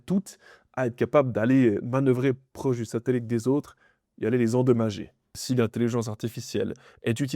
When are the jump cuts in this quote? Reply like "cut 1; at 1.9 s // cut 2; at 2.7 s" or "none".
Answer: cut 1; at 5.4 s

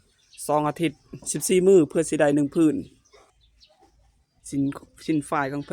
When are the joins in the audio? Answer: cut 1; at 3.3 s

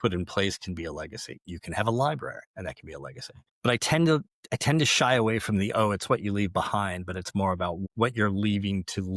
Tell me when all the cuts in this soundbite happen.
cut 1; at 2.4 s

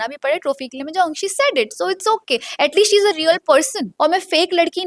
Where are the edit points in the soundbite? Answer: cut 1; at 3.9 s

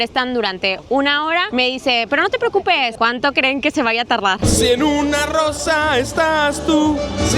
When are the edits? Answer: cut 1; at 2.9 s // cut 2; at 4.4 s

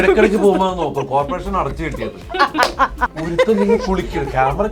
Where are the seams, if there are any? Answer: cut 1; at 3.1 s

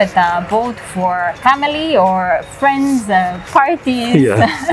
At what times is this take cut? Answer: cut 1; at 1.3 s

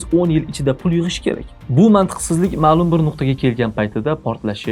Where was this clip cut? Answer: cut 1; at 1.6 s

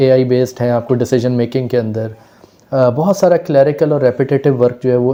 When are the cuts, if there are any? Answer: none

